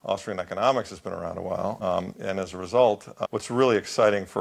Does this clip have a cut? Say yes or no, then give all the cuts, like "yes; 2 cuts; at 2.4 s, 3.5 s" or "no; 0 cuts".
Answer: yes; 2 cuts; at 1.8 s, 3.1 s